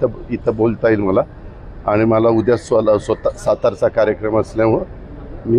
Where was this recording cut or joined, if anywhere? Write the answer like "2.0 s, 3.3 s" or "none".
none